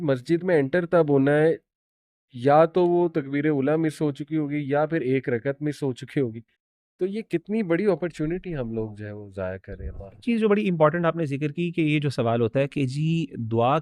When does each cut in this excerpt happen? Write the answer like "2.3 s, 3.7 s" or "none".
10.2 s